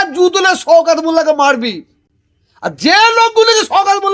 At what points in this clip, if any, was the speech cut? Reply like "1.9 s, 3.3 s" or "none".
none